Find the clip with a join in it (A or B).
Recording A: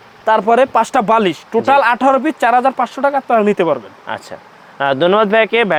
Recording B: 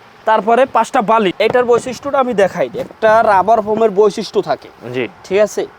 B